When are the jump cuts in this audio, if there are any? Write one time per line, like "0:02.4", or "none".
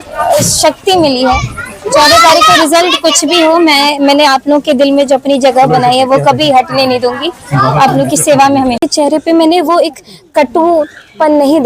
0:08.8